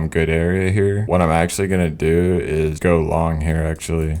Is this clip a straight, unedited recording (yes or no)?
no